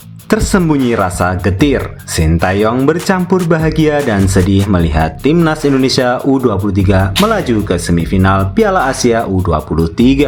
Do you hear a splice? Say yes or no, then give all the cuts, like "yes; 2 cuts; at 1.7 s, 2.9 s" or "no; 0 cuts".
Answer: no; 0 cuts